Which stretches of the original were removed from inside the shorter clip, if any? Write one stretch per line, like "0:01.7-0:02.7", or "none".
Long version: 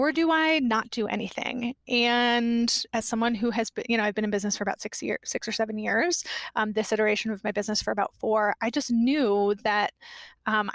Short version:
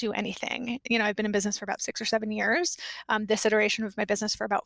0:01.8-0:03.8
0:04.9-0:05.3